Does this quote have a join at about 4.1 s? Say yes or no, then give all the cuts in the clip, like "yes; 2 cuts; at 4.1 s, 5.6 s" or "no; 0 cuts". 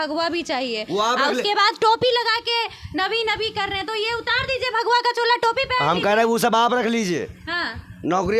no; 0 cuts